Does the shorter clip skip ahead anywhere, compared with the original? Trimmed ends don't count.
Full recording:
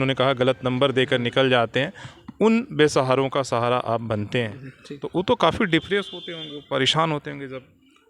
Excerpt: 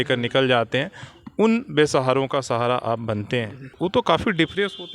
yes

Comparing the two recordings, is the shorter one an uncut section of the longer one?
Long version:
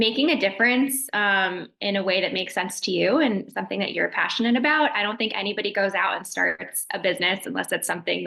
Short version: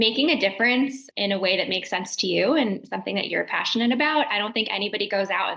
no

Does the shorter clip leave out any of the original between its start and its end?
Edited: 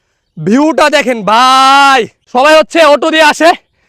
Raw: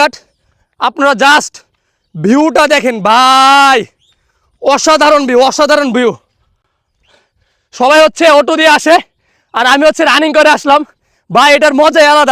yes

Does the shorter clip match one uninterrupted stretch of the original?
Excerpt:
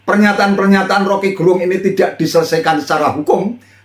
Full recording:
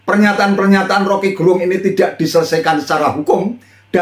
yes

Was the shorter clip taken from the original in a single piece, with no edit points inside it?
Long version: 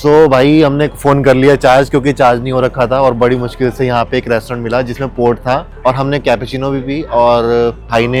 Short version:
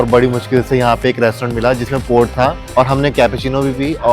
yes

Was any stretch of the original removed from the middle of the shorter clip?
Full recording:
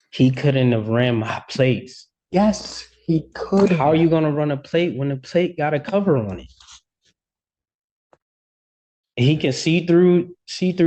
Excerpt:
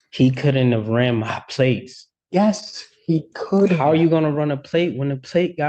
no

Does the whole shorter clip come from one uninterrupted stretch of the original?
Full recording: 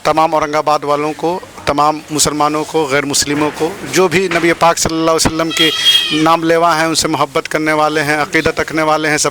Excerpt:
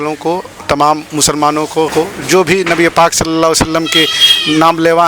no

